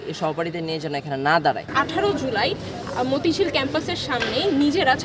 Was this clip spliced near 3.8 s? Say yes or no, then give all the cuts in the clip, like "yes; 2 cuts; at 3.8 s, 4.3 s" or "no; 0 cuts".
no; 1 cut; at 1.7 s